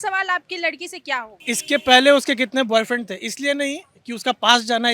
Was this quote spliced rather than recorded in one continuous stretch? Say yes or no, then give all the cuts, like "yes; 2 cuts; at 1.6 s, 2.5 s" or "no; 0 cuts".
yes; 1 cut; at 1.3 s